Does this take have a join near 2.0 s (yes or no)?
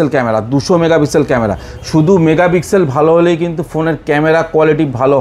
no